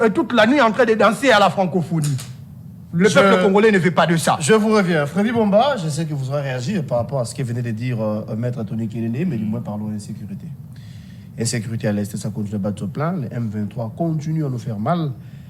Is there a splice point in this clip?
no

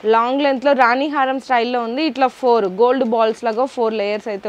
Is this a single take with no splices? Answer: yes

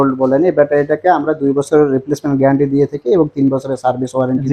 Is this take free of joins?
yes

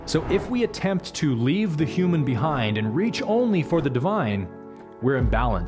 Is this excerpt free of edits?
yes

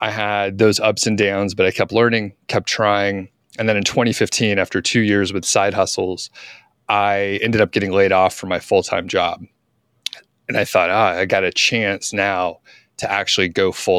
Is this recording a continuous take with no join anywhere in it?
yes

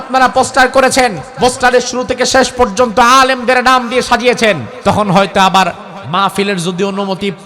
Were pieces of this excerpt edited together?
yes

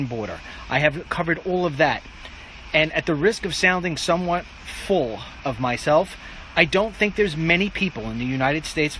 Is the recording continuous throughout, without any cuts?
no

